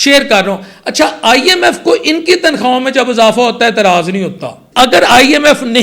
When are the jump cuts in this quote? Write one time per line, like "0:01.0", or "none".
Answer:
0:04.6